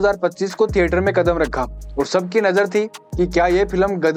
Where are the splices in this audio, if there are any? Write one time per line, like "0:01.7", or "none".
none